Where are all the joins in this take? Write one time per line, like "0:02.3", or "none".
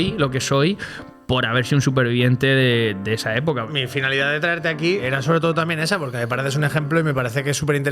0:03.7
0:05.0